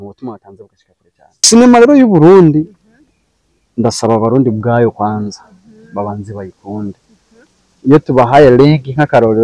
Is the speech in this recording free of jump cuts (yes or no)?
no